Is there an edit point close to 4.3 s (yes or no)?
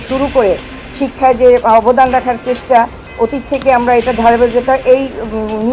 no